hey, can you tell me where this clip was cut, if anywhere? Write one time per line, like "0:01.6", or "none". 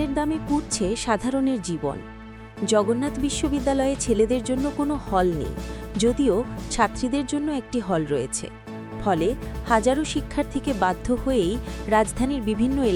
none